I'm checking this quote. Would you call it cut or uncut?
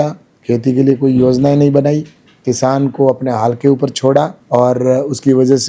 uncut